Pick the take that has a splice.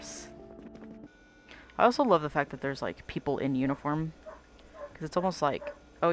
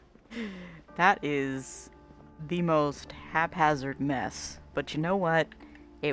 first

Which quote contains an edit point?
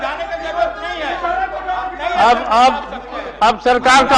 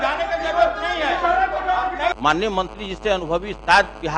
second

